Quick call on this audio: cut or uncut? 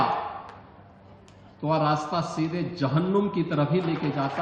uncut